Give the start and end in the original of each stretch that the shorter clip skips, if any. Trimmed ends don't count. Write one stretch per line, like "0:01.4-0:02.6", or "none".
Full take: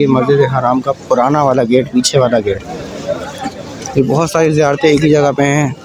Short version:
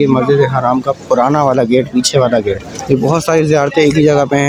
0:02.7-0:03.8